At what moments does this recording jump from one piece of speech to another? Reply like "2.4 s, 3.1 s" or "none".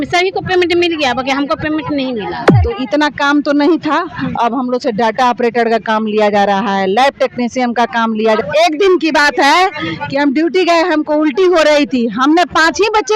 2.5 s, 8.4 s